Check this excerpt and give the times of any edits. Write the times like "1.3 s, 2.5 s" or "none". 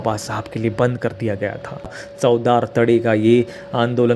2.0 s